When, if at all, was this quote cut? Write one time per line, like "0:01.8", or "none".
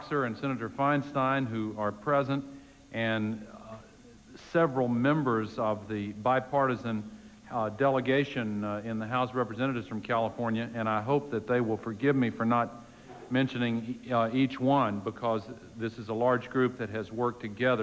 none